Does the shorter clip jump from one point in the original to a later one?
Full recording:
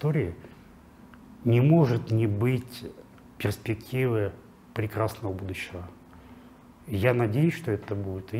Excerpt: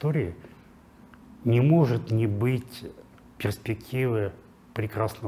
no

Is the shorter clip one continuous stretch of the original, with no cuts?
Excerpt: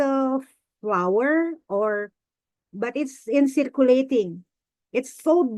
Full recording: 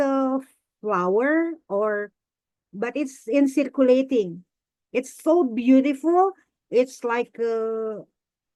yes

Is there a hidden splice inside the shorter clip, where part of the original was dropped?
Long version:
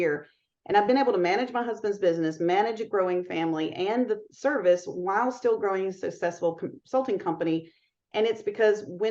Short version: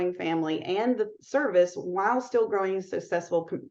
no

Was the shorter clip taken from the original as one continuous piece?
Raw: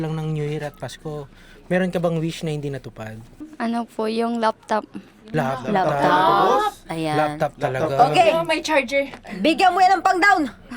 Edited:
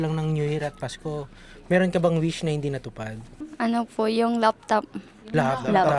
yes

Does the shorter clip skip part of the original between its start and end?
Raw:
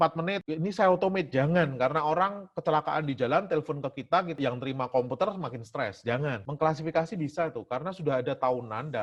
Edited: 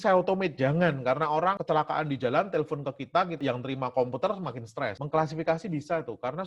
yes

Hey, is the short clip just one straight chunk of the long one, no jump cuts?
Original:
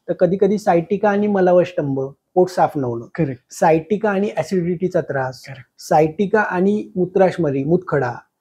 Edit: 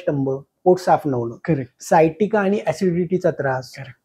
yes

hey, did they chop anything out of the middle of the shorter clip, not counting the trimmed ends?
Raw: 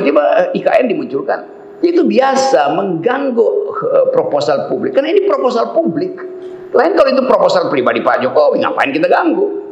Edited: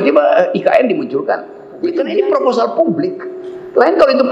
yes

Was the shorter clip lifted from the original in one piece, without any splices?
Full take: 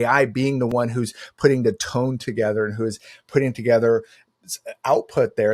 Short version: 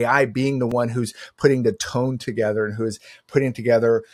yes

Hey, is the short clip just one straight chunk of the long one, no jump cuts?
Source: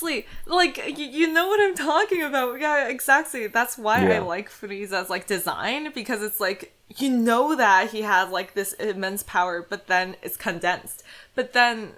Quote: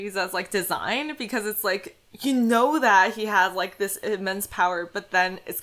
yes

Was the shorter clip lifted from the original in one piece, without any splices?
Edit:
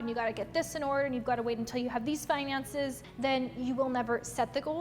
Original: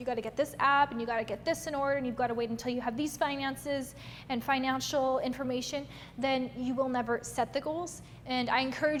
no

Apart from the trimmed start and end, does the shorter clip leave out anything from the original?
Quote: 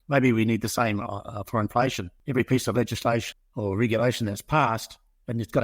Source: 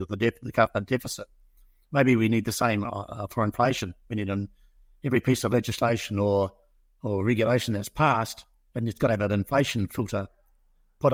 yes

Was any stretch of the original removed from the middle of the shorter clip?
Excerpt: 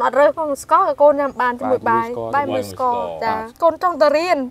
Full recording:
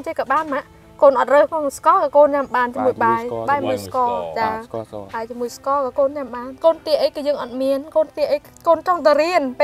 yes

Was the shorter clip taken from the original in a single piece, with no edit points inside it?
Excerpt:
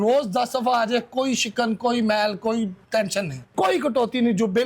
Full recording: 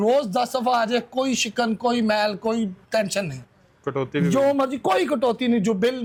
no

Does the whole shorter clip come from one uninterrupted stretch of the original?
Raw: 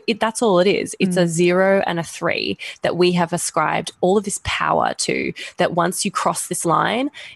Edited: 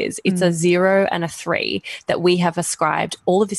yes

